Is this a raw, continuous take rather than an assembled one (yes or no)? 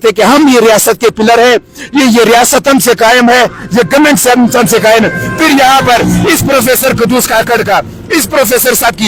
yes